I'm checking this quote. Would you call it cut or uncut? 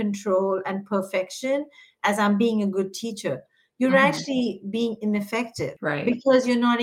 cut